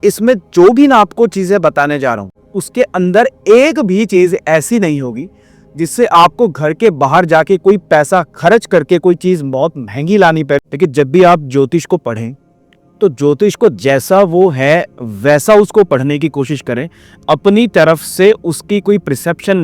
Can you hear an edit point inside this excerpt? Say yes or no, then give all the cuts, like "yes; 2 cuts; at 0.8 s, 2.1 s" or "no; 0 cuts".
yes; 2 cuts; at 2.4 s, 10.6 s